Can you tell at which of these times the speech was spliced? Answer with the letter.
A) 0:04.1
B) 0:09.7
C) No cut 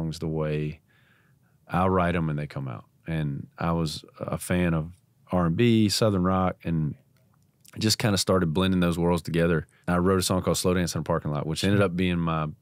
B